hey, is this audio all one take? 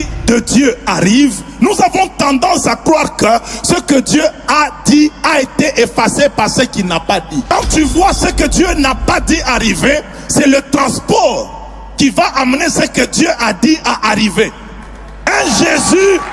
no; 2 cuts; at 7.5 s, 15.1 s

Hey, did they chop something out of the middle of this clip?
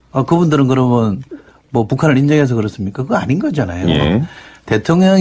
no; 0 cuts

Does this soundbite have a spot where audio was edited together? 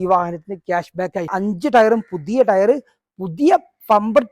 yes; 1 cut; at 1.3 s

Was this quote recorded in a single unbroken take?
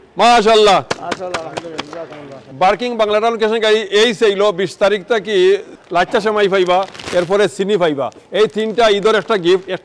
no; 2 cuts; at 2.4 s, 5.8 s

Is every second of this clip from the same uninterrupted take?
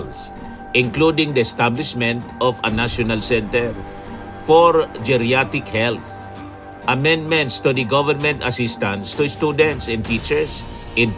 yes; 0 cuts

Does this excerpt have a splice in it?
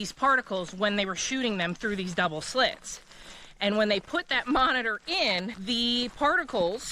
yes; 1 cut; at 5.6 s

